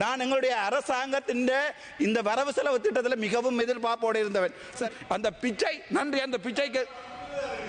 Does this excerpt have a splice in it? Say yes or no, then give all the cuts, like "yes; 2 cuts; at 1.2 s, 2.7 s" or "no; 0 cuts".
yes; 1 cut; at 4.9 s